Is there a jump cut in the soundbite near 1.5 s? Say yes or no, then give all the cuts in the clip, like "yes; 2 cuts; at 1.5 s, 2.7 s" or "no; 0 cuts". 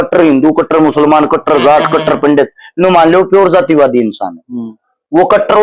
no; 0 cuts